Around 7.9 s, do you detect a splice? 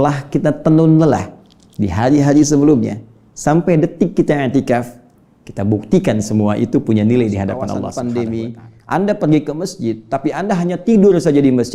yes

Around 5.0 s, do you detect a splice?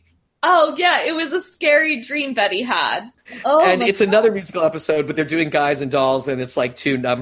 no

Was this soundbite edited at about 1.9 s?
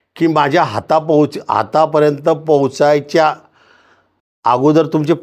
no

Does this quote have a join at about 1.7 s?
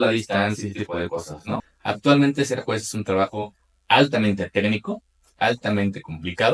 yes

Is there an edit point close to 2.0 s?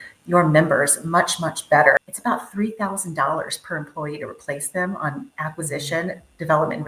yes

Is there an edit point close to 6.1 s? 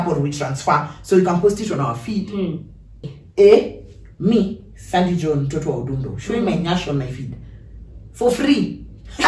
no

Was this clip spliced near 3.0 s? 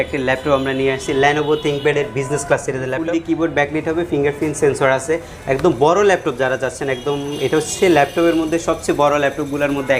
yes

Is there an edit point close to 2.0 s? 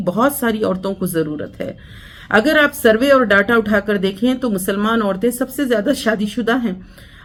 no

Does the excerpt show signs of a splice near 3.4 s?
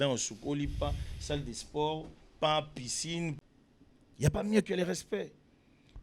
yes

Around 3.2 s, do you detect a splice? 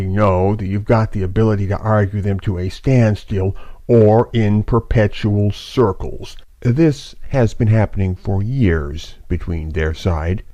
no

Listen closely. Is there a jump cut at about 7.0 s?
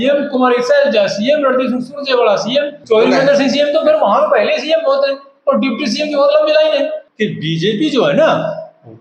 yes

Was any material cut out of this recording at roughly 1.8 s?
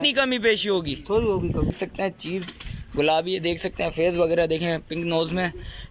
yes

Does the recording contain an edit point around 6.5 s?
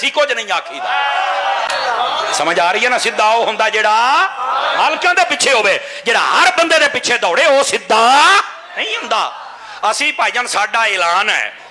no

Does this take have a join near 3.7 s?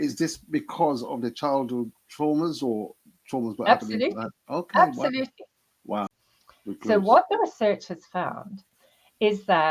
no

